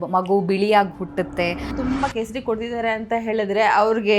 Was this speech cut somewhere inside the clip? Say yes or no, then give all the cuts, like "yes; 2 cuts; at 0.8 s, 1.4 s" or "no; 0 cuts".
yes; 1 cut; at 1.7 s